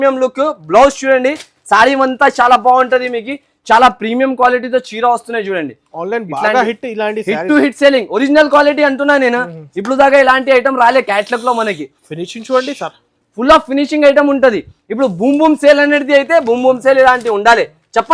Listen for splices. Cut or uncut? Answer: uncut